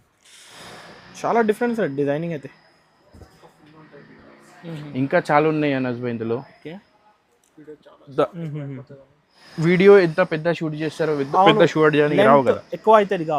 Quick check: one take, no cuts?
yes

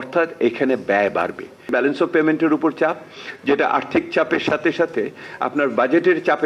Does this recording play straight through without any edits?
no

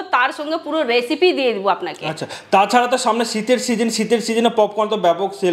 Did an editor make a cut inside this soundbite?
no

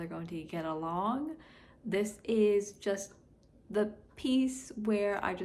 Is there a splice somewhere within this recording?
no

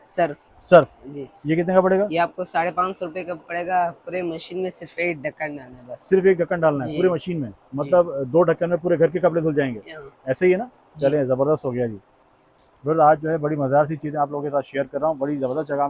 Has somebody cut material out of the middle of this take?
no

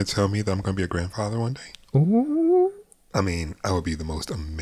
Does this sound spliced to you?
yes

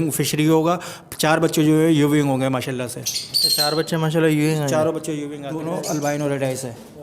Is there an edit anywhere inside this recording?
yes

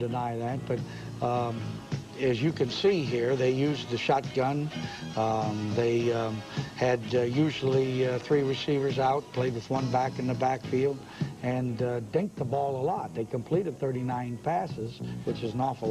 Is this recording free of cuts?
no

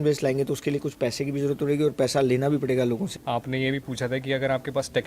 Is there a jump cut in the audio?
yes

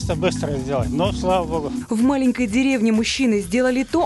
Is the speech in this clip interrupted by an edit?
yes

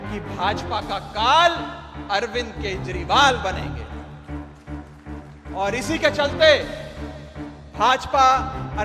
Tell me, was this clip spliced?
yes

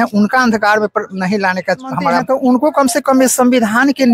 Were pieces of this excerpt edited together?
yes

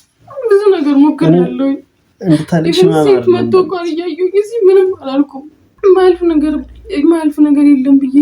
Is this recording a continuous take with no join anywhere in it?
no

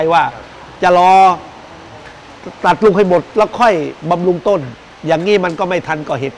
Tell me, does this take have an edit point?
no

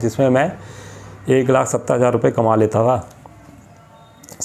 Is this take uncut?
yes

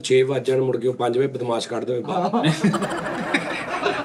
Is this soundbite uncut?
yes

